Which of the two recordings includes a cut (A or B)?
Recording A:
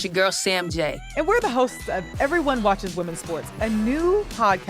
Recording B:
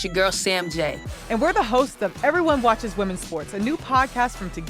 A